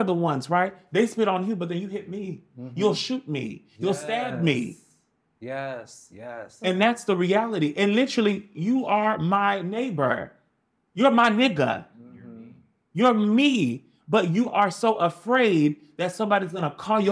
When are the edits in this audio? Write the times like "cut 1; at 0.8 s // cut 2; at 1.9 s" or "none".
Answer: none